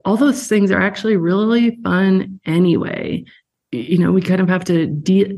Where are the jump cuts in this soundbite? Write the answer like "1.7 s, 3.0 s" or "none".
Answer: 3.4 s